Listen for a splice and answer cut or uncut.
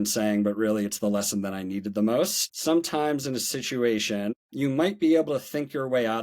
cut